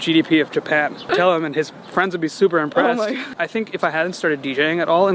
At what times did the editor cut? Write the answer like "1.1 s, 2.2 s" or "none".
1.1 s, 3.3 s

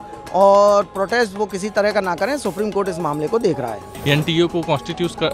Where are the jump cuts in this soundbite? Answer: 3.9 s

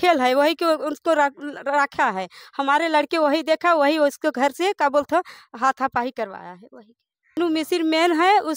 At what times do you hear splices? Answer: 7.4 s

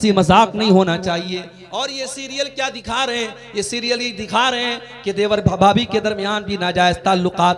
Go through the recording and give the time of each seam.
none

